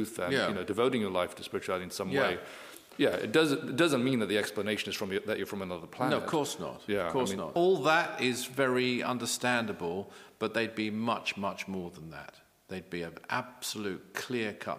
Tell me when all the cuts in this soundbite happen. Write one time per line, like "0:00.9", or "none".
0:07.5

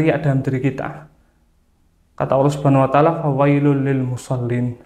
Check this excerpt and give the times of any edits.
none

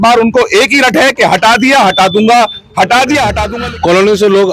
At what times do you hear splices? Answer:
0:03.4

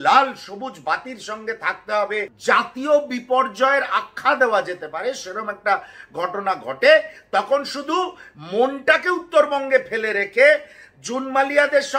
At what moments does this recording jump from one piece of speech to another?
0:02.3

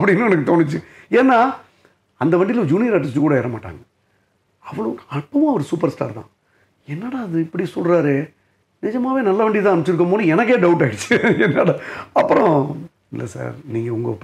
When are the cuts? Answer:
none

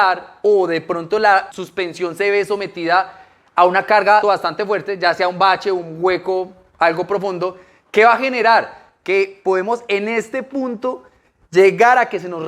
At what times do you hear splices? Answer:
0:01.6
0:04.2

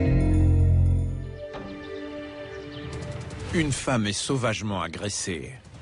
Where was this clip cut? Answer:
0:01.3

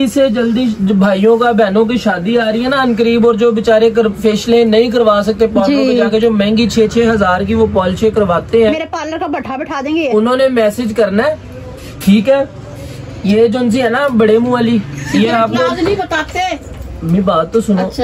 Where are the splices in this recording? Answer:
0:15.0

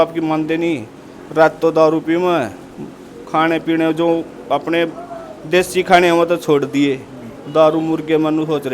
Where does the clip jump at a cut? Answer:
none

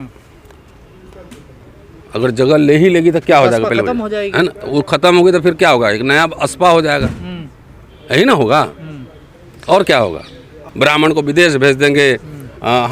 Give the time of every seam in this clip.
0:10.6

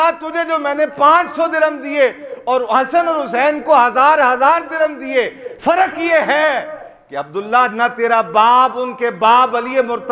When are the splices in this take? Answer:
0:05.4

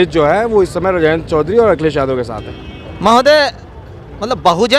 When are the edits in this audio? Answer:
none

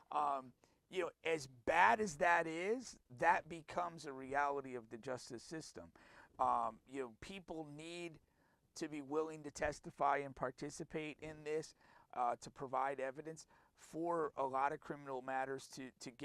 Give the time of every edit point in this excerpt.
none

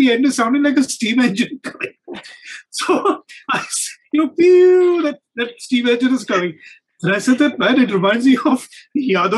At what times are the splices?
none

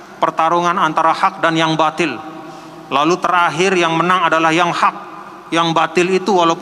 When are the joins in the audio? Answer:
none

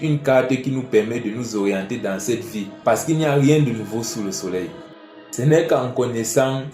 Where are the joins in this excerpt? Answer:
0:02.6
0:04.9

